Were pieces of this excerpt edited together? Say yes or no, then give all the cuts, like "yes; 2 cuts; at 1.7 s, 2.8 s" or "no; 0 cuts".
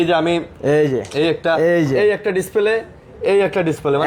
no; 0 cuts